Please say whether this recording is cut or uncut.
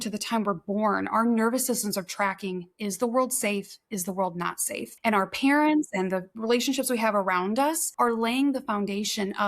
cut